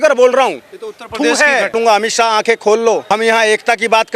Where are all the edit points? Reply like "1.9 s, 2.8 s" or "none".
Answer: 1.7 s, 3.0 s